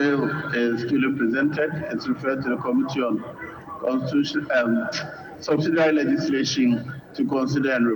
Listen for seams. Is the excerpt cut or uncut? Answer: uncut